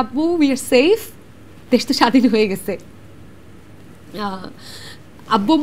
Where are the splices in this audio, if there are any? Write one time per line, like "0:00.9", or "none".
none